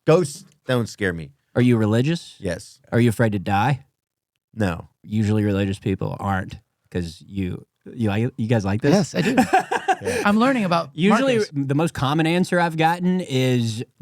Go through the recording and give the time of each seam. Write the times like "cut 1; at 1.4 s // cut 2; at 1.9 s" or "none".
cut 1; at 2.7 s // cut 2; at 4.9 s // cut 3; at 11.5 s